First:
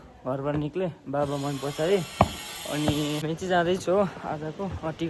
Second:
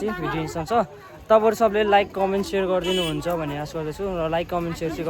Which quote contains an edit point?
first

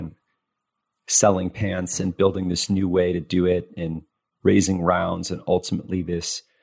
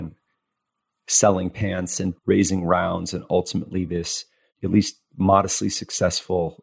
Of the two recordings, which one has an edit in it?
second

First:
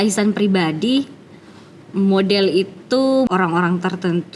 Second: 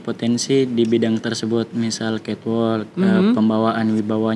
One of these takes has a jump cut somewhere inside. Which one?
first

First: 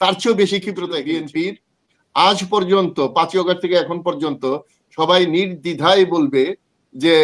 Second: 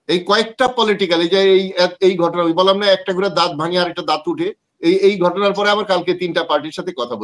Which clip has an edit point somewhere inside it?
first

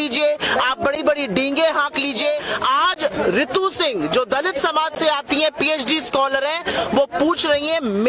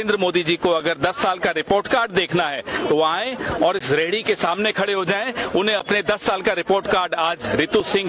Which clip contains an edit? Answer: first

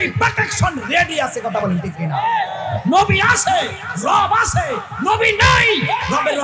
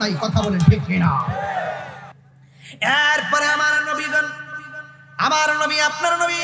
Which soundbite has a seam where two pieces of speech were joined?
second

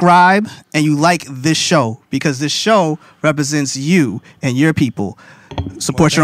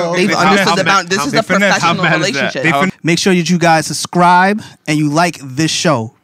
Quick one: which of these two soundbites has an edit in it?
second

